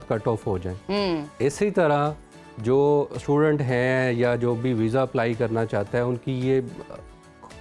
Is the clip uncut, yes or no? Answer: yes